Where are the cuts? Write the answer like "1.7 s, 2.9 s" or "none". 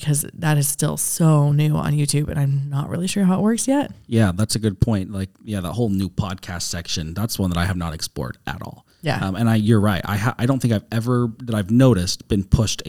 none